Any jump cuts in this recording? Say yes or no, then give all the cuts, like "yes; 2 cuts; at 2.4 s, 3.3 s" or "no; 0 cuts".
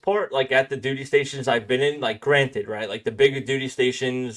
no; 0 cuts